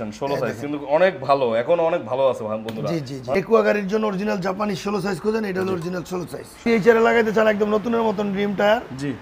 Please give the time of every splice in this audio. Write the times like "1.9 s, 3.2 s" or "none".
3.3 s, 6.6 s